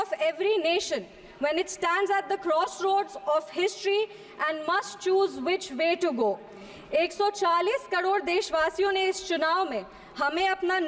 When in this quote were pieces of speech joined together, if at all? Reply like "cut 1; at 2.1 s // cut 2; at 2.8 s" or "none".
none